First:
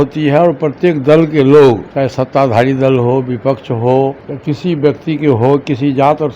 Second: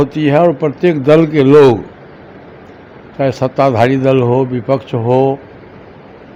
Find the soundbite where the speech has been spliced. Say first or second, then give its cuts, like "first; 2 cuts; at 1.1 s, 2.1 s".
first; 2 cuts; at 1.9 s, 4.3 s